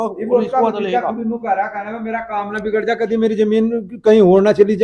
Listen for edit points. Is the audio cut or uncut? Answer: uncut